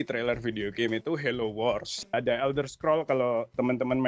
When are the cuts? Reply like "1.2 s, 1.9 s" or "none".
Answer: 2.1 s